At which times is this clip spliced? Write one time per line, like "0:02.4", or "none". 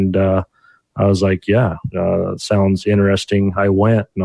none